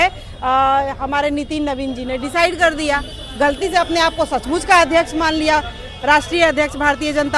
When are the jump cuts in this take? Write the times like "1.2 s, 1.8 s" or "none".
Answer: none